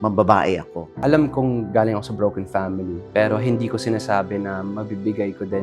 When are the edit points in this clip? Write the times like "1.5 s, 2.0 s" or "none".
1.0 s